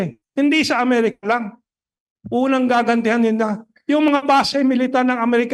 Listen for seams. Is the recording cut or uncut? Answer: uncut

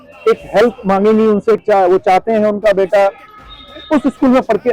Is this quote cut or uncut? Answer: cut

